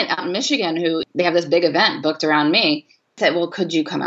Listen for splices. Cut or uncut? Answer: cut